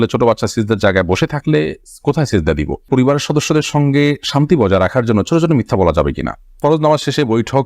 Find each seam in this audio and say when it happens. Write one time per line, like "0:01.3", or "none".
0:02.8
0:06.6